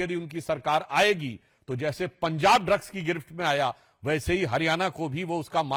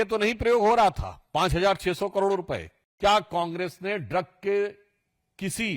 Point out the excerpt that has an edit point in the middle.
second; 1 cut; at 2.8 s

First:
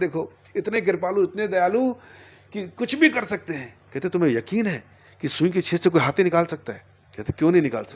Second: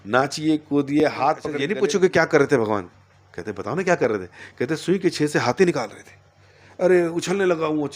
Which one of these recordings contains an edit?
second; 1 cut; at 1.6 s

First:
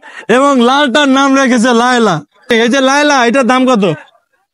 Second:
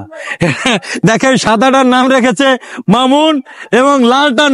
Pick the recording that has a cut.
first; 1 cut; at 2.5 s

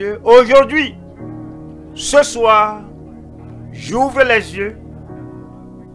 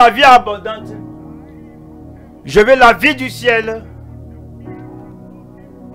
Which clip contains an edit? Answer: first; 1 cut; at 4.8 s

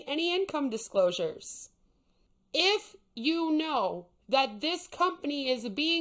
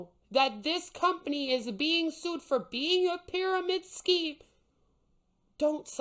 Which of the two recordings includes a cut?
first; 1 cut; at 2.1 s

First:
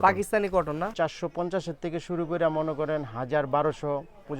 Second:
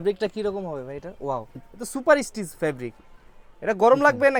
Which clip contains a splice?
first; 1 cut; at 0.9 s

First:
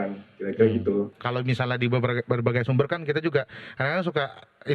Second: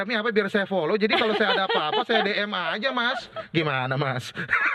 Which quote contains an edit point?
first; 1 cut; at 1.2 s

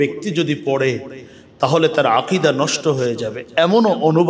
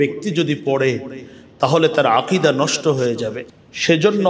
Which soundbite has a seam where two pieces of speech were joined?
second; 1 cut; at 3.4 s

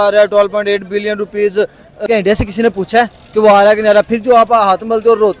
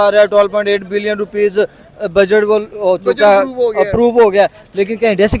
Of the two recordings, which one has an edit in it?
first; 1 cut; at 2.0 s

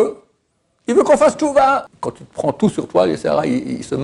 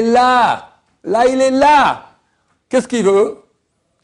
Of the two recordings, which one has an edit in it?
first; 1 cut; at 1.9 s

